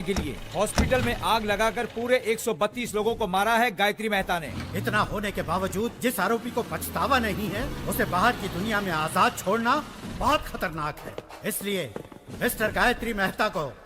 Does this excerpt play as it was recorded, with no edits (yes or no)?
no